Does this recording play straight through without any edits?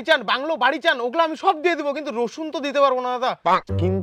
yes; 0 cuts

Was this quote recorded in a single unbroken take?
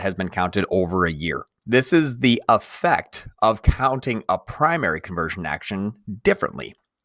no; 1 cut; at 1.5 s

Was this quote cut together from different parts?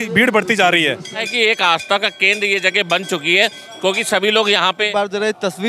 yes; 2 cuts; at 1.3 s, 4.9 s

